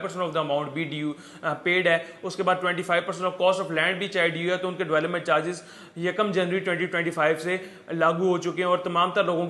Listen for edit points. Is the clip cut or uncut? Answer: uncut